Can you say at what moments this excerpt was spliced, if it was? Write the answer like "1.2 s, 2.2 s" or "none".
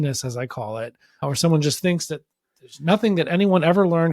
1.2 s